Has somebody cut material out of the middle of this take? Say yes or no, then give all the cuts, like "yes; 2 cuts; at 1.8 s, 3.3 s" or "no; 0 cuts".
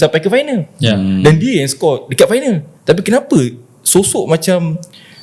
yes; 1 cut; at 2.7 s